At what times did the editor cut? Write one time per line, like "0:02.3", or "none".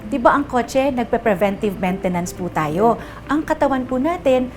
none